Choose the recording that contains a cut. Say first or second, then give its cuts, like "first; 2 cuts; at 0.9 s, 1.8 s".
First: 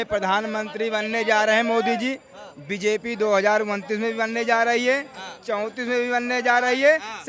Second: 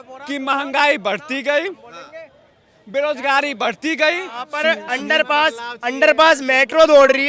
second; 1 cut; at 4.5 s